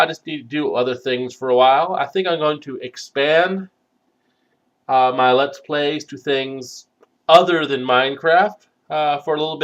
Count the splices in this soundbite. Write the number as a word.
zero